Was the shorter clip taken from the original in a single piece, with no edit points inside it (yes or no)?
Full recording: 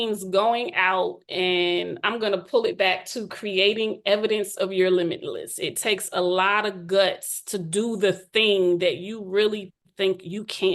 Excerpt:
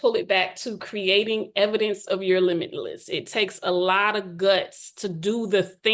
yes